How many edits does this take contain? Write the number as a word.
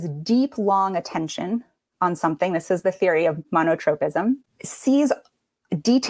two